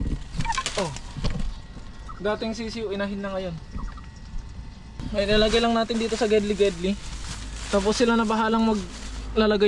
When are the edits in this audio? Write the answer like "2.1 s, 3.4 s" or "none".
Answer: 5.0 s